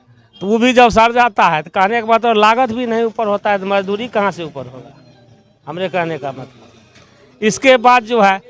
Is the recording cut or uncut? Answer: uncut